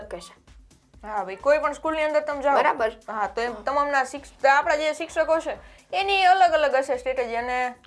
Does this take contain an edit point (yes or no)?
no